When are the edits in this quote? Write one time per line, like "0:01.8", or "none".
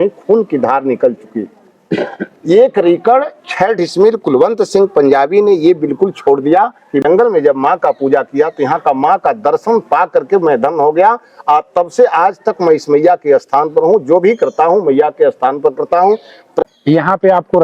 0:07.0
0:16.5